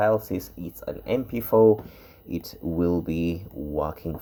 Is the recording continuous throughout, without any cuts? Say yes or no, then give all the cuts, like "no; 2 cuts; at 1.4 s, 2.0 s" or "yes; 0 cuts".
yes; 0 cuts